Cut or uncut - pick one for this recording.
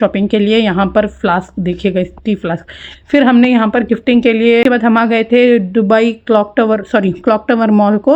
cut